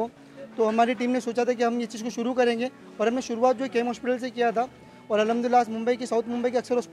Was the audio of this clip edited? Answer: no; 0 cuts

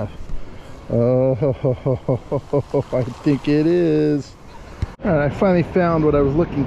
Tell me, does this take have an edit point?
yes; 1 cut; at 4.9 s

